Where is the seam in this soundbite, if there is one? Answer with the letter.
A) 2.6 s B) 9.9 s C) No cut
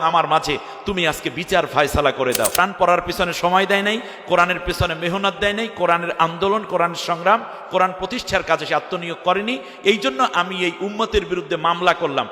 A